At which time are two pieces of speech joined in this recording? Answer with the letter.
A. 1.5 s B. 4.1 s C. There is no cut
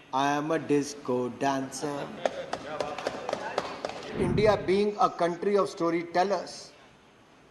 B